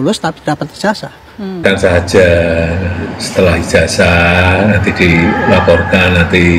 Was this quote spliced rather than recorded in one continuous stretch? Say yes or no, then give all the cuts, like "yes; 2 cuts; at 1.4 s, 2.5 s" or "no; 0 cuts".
yes; 1 cut; at 1.6 s